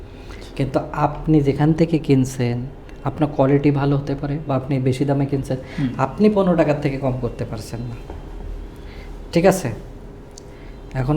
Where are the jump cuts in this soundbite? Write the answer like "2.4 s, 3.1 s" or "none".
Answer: none